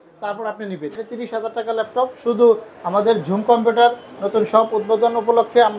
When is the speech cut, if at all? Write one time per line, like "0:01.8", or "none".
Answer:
0:00.9